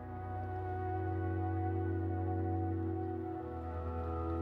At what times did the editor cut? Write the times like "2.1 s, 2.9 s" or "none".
none